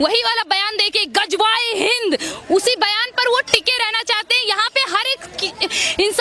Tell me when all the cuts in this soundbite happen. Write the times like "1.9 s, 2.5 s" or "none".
none